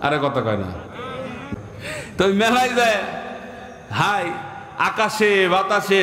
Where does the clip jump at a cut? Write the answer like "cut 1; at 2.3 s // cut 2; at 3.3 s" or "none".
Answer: cut 1; at 1.5 s